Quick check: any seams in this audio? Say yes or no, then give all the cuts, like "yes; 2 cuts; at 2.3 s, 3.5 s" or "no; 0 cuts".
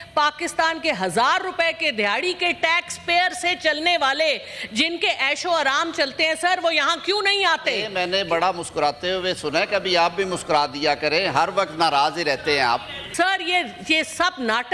yes; 2 cuts; at 7.9 s, 13.0 s